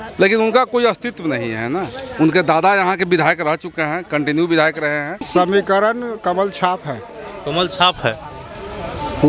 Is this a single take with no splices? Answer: no; 1 cut; at 5.2 s

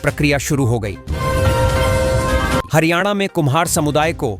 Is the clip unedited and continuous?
no; 2 cuts; at 1.0 s, 2.7 s

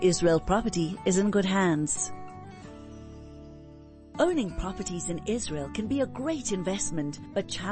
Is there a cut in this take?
yes; 2 cuts; at 1.9 s, 4.1 s

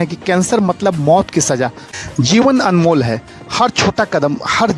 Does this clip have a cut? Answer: yes; 1 cut; at 1.8 s

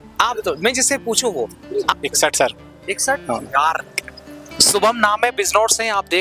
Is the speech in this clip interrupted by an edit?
yes; 1 cut; at 1.9 s

